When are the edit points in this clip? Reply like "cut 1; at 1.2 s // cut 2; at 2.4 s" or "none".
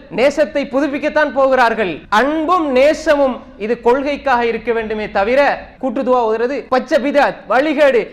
cut 1; at 2.0 s // cut 2; at 5.7 s // cut 3; at 6.6 s